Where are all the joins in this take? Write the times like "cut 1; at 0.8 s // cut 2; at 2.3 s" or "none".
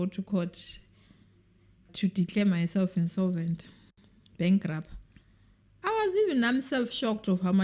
cut 1; at 1.9 s